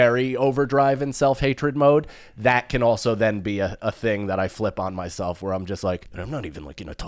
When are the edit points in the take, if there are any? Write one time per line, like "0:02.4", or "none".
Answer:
0:06.1

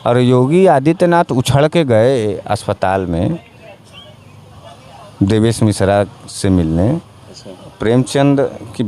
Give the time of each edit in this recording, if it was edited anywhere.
none

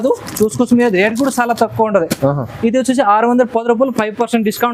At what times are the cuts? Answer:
none

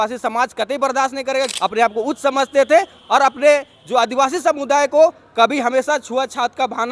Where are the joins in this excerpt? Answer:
0:01.5

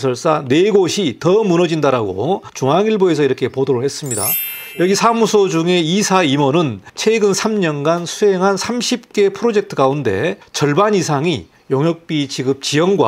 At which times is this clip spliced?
0:02.5
0:04.4

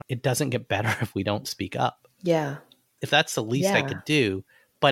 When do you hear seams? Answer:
none

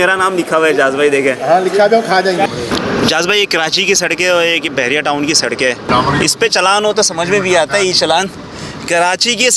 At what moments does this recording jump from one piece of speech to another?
0:02.5
0:05.9

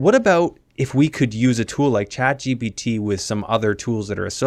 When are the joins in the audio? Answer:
none

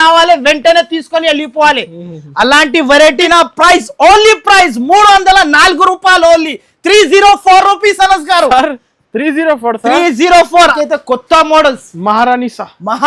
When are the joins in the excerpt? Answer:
0:03.2
0:10.7

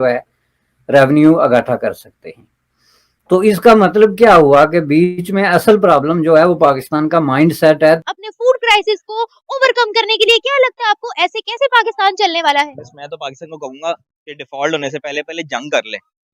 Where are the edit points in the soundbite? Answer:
0:08.0

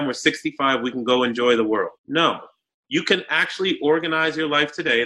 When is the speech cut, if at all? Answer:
0:02.3

